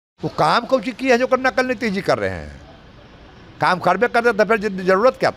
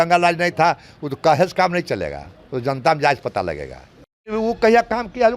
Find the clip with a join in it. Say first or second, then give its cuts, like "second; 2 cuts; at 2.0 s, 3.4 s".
second; 1 cut; at 4.3 s